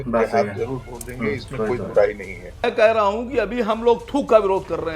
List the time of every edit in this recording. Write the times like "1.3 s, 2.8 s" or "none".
2.6 s